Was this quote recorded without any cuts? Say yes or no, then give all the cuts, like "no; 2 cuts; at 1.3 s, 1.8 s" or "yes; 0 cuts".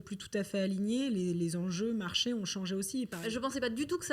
no; 1 cut; at 3.2 s